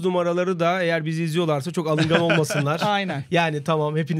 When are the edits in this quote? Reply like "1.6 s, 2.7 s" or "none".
none